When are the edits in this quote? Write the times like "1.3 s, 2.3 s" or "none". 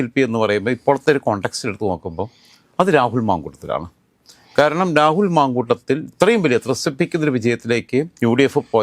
none